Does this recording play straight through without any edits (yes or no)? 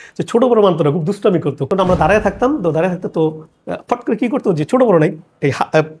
no